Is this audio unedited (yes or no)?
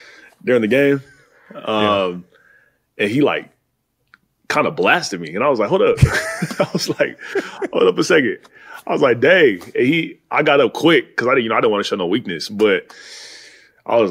yes